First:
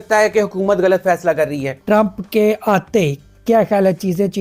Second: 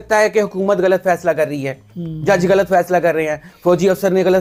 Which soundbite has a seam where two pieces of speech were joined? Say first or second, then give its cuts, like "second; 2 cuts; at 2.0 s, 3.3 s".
first; 1 cut; at 1.7 s